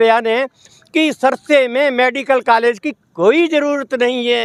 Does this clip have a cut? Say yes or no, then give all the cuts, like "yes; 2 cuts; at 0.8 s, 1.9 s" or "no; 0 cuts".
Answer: no; 0 cuts